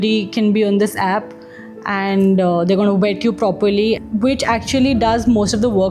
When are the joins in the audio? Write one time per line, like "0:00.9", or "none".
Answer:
none